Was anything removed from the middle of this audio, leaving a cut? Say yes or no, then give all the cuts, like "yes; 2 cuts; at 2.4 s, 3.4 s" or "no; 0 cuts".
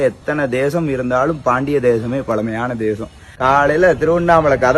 yes; 1 cut; at 3.3 s